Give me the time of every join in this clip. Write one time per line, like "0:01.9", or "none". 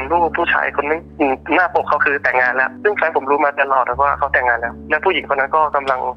0:01.1
0:02.7